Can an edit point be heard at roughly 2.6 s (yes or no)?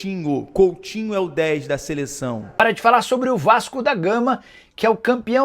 yes